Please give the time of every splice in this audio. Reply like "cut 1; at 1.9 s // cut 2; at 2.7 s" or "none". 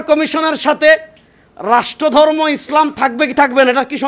none